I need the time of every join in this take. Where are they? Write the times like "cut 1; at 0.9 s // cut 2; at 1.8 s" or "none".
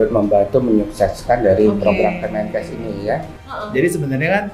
cut 1; at 3.4 s